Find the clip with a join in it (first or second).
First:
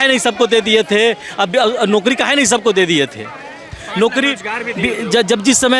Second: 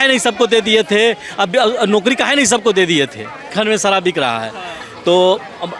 second